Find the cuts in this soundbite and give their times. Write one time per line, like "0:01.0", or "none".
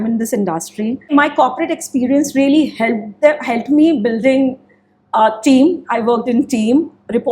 none